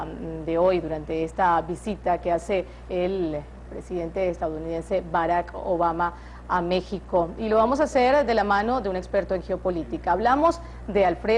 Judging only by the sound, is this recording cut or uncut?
uncut